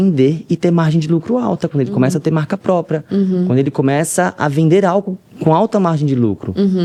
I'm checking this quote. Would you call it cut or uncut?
uncut